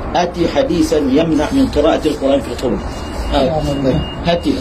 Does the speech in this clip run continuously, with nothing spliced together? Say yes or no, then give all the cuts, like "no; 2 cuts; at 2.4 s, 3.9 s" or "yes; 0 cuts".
yes; 0 cuts